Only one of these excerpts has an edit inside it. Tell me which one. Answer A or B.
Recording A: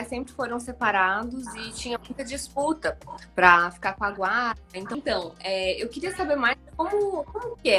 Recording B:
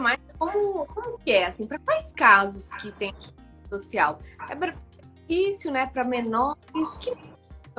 A